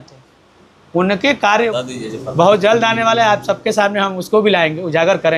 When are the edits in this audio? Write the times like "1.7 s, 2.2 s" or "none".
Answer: 1.7 s